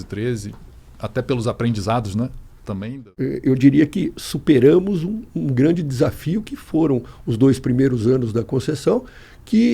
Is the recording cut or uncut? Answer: cut